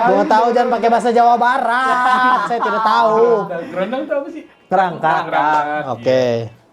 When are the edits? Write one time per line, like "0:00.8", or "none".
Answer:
none